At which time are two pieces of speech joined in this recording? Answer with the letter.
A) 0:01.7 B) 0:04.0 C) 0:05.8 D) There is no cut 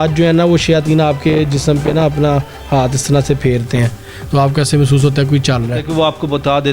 C